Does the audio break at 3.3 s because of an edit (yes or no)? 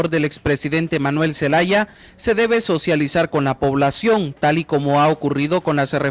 yes